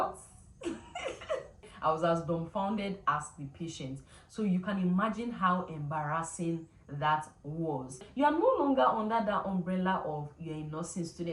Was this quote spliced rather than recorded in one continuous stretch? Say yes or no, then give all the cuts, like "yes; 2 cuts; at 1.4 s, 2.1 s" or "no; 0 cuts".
yes; 2 cuts; at 1.7 s, 8.1 s